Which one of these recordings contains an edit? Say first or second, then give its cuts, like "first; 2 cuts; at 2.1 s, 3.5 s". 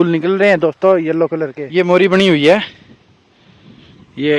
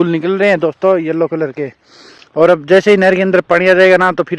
first; 1 cut; at 1.6 s